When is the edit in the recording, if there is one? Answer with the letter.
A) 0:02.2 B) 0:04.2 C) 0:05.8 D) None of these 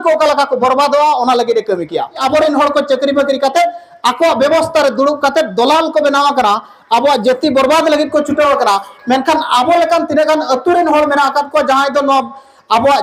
A